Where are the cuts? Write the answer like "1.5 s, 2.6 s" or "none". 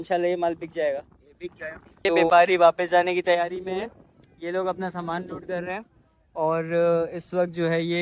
2.1 s